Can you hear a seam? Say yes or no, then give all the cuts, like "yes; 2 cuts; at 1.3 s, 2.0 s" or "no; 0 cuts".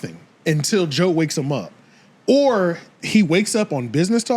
no; 0 cuts